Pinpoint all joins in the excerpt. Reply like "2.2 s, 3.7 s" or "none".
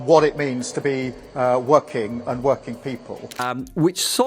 3.3 s

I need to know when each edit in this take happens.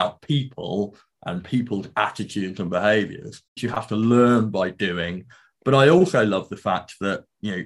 3.6 s

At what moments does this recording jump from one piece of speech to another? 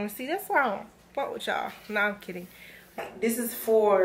3.0 s

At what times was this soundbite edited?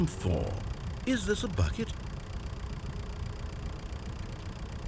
none

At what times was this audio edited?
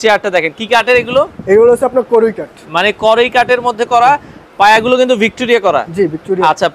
none

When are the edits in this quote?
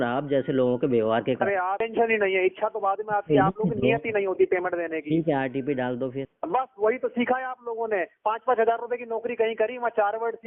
1.9 s, 6.3 s

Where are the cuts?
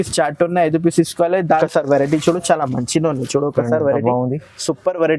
1.6 s

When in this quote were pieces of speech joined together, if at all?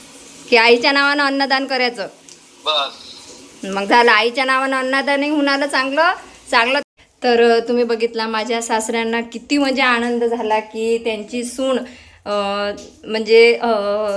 6.8 s

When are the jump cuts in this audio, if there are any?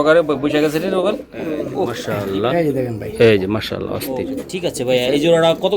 2.0 s, 4.4 s

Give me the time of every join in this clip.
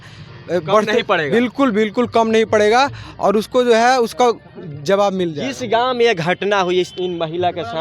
none

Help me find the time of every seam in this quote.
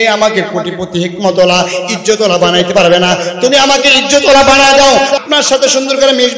5.2 s

